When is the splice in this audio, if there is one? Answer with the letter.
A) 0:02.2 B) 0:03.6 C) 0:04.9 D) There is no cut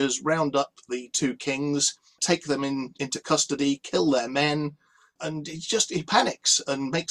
A